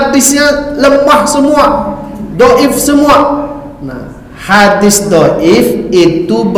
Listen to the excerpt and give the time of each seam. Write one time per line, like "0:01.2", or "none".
none